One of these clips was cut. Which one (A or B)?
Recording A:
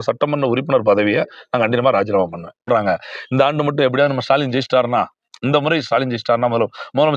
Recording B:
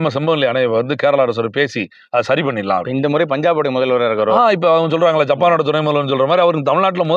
A